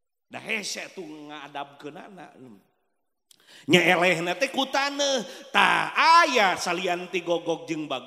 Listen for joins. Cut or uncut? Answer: uncut